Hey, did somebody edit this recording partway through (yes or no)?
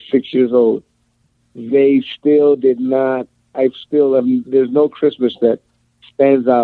no